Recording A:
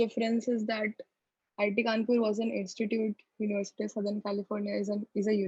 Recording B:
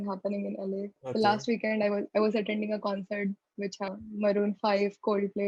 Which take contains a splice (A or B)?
B